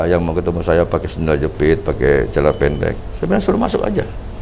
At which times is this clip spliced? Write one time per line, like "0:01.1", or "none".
0:03.1